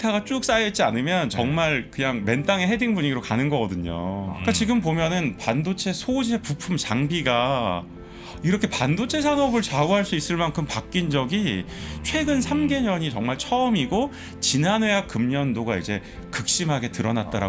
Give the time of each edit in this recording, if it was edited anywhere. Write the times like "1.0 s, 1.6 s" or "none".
4.3 s